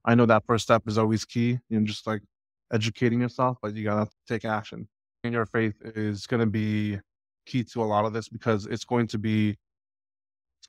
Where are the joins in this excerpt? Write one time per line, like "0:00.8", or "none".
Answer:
0:05.3